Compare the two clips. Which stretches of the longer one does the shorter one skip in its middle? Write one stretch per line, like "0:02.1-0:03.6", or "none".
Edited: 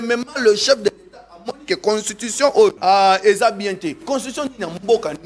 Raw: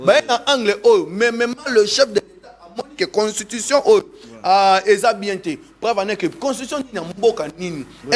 0:04.1-0:04.4
0:05.6-0:06.4